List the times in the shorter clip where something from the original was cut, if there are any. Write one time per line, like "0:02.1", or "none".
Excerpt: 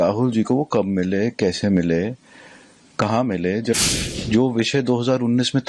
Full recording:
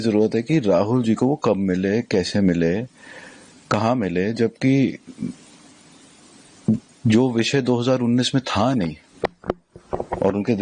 0:03.9